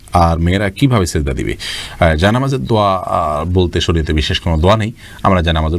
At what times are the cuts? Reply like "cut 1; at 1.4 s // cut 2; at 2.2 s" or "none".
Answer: none

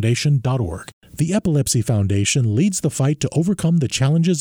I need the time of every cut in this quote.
cut 1; at 0.9 s

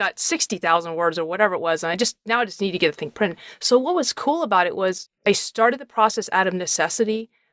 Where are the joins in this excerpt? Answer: cut 1; at 3.5 s

